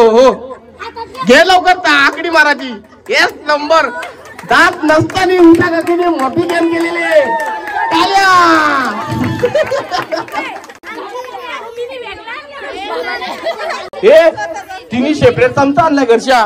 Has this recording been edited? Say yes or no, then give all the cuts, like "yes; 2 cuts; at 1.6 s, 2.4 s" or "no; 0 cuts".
no; 0 cuts